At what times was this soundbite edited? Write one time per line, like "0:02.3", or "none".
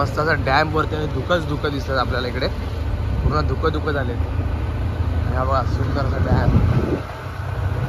none